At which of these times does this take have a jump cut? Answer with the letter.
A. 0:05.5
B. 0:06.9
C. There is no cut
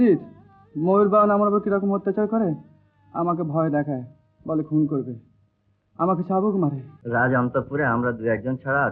B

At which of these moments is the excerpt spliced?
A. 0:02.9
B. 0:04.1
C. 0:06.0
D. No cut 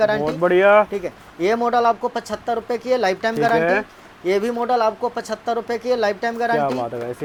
D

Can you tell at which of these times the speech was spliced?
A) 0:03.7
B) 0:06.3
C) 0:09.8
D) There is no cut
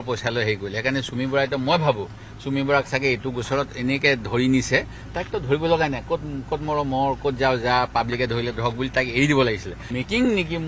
C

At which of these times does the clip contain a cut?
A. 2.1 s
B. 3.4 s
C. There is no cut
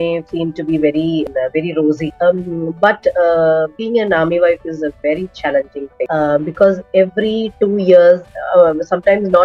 A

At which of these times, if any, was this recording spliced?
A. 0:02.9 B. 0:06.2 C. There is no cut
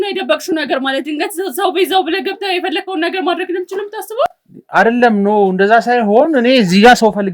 C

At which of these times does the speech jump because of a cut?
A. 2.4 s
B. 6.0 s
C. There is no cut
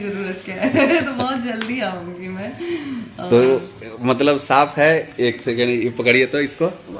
C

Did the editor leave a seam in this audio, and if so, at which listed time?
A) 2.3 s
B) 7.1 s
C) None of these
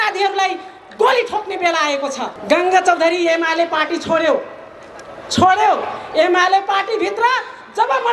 A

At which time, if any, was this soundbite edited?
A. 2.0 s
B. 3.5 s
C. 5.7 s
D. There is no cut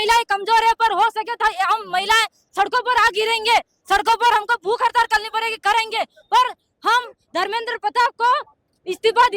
B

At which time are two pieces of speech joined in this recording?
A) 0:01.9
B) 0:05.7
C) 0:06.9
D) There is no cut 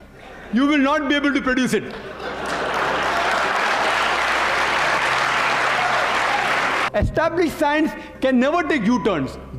C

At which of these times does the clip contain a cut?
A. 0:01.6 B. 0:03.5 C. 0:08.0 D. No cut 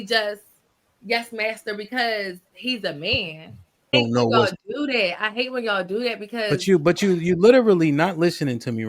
B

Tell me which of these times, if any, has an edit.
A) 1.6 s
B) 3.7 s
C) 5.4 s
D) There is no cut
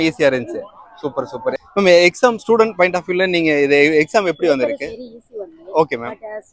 A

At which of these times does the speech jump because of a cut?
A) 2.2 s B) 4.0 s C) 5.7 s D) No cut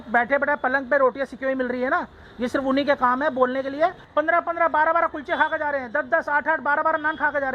B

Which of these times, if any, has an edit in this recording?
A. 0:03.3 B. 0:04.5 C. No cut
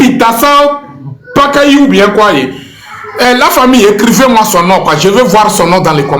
B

